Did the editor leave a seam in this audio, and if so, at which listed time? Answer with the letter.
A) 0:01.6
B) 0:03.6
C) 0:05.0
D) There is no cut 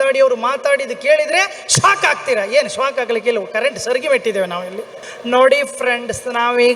C